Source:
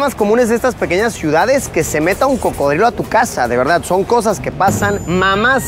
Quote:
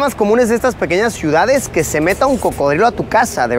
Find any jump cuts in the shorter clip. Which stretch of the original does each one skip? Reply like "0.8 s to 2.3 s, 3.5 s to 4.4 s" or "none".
none